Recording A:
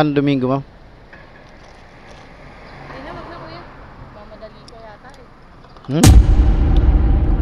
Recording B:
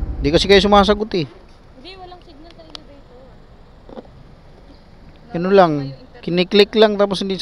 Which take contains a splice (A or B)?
A